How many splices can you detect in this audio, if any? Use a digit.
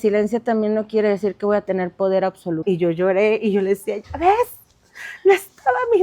1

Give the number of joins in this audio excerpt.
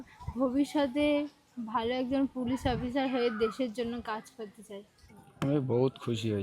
1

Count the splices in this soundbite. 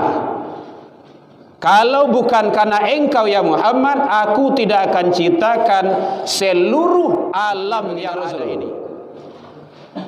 1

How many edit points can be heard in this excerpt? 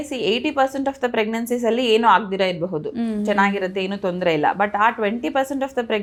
0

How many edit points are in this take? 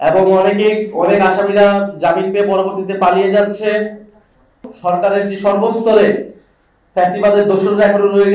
1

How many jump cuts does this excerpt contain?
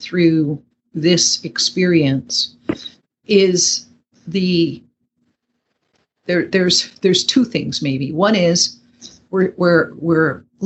0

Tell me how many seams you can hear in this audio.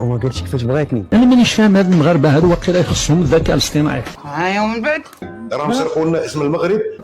3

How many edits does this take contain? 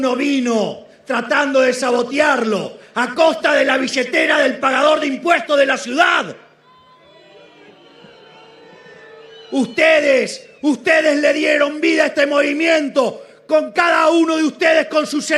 0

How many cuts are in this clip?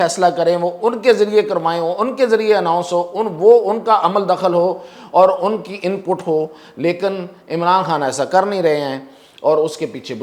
0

